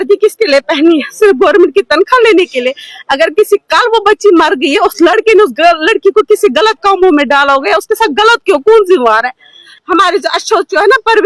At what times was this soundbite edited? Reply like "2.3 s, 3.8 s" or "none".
9.7 s